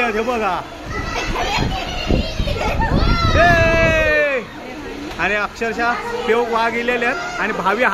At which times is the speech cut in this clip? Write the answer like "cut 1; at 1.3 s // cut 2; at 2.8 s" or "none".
none

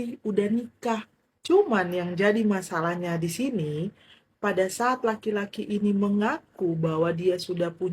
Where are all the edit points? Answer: none

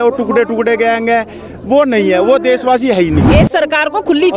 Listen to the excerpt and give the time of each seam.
cut 1; at 3.3 s

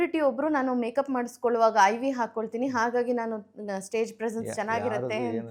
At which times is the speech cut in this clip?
none

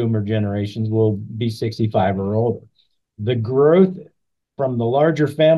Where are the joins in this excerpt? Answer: none

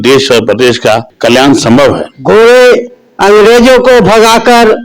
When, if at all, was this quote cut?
cut 1; at 1.1 s // cut 2; at 2.1 s

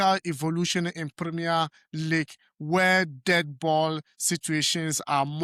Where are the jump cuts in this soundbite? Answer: none

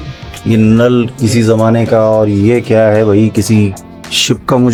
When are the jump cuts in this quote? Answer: none

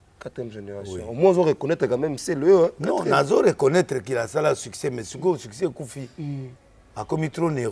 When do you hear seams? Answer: none

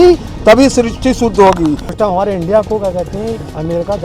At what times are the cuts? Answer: cut 1; at 1.9 s

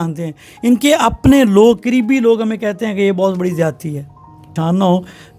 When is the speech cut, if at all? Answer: cut 1; at 4.4 s

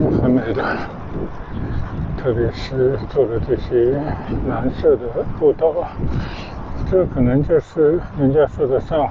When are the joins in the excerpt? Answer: none

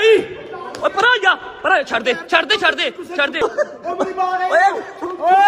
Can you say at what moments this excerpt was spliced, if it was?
cut 1; at 3.4 s

